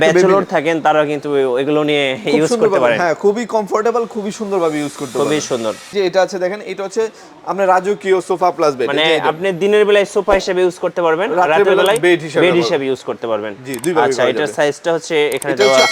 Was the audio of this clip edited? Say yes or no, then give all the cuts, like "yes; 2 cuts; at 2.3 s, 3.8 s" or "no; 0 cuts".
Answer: yes; 1 cut; at 5.8 s